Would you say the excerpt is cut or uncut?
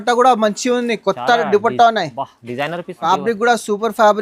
cut